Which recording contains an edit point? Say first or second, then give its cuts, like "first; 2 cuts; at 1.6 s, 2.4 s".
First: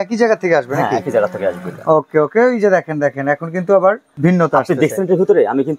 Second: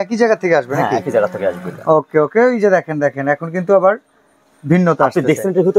first; 1 cut; at 4.1 s